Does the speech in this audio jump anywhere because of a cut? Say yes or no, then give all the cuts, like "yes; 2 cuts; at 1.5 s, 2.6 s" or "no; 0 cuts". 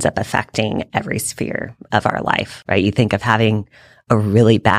yes; 1 cut; at 2.5 s